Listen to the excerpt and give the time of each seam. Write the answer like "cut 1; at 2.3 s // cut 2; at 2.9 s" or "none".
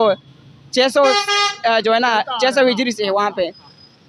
none